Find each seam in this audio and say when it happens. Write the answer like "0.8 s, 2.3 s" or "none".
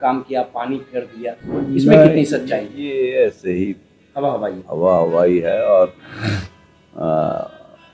none